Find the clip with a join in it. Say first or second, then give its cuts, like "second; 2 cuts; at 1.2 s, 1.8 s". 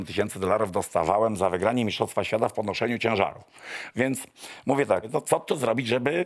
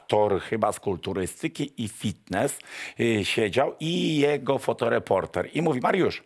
first; 1 cut; at 5.1 s